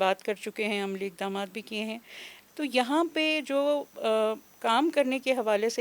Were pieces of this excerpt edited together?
no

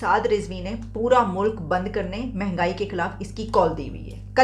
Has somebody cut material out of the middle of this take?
no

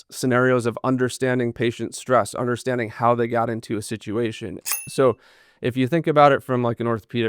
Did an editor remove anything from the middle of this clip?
yes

